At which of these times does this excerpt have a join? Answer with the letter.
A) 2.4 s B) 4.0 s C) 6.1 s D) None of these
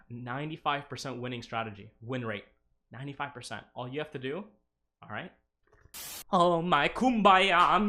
C